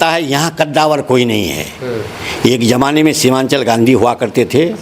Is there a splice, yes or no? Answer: no